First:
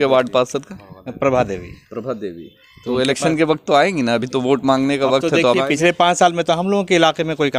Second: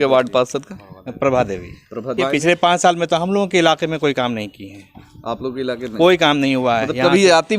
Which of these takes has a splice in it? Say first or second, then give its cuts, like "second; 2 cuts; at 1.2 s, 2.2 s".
second; 1 cut; at 2.2 s